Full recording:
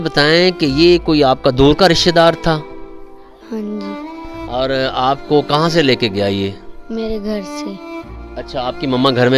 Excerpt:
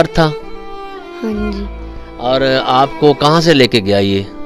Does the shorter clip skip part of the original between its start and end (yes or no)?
no